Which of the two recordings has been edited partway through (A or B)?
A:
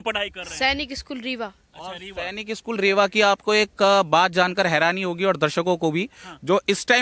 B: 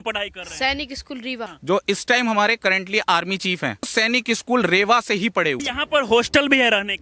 B